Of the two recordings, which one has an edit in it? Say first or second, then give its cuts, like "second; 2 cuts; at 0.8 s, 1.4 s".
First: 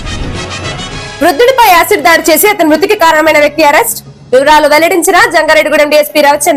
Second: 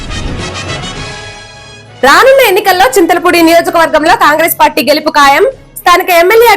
second; 1 cut; at 1.2 s